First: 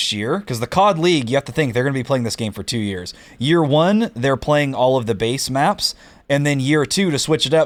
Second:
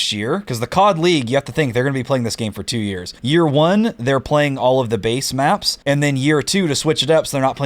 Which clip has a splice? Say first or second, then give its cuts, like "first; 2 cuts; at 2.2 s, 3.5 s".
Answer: second; 2 cuts; at 3.1 s, 5.7 s